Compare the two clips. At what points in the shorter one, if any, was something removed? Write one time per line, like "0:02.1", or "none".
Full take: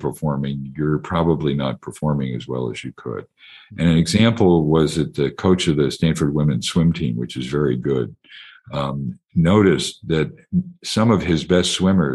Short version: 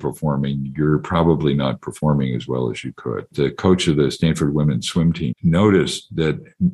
0:03.3
0:05.3